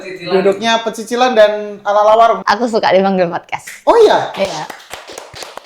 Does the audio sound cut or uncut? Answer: cut